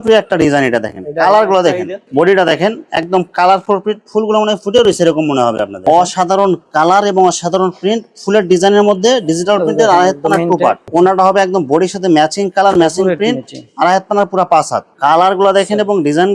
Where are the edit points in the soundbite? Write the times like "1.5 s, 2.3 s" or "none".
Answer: 1.9 s, 5.8 s, 10.8 s, 14.9 s

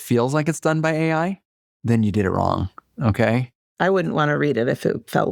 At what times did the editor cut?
none

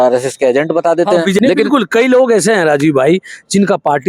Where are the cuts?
1.4 s

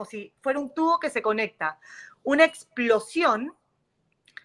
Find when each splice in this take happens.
none

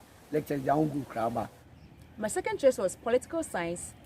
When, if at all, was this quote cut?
1.6 s

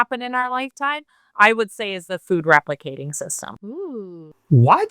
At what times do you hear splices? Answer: 3.5 s

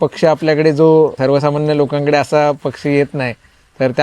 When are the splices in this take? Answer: 1.2 s

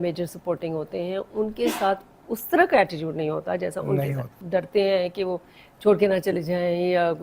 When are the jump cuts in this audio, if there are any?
4.3 s

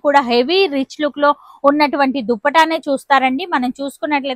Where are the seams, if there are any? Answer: none

